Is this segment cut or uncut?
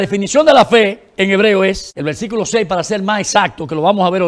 cut